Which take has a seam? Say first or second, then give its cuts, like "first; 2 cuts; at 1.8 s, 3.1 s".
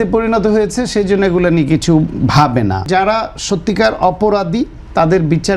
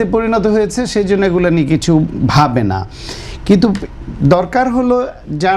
first; 1 cut; at 2.8 s